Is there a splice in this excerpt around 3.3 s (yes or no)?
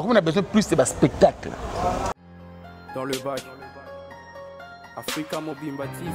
no